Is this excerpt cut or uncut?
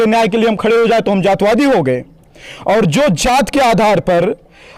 uncut